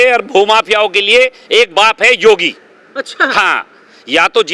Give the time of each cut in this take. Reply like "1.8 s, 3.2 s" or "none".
none